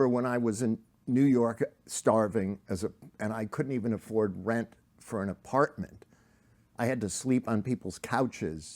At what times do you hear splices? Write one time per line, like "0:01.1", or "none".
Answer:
0:00.9

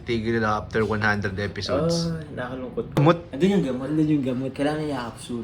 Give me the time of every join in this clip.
0:03.0

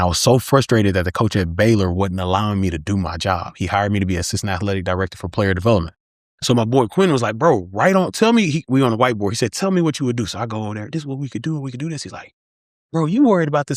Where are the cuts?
none

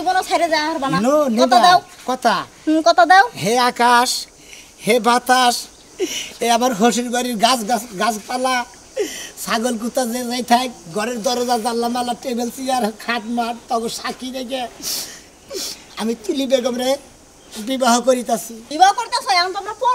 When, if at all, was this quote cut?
0:18.6

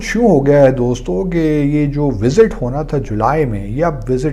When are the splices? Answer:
none

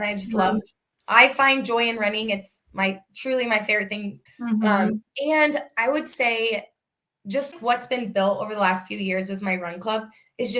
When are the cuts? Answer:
0:04.2
0:07.5

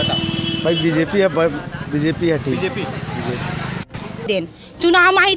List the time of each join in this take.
0:04.3

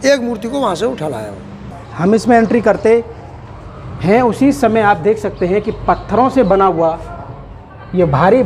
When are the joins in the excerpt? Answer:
0:01.8

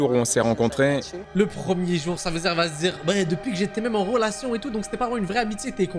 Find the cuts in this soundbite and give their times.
none

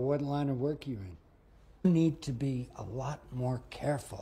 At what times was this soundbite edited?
none

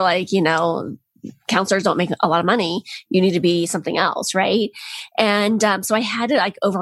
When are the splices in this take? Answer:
none

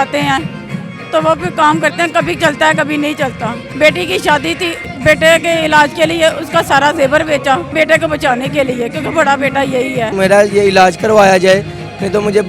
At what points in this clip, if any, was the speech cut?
0:03.6
0:04.8
0:07.7
0:10.1

